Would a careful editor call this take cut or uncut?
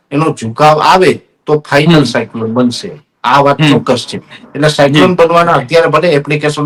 uncut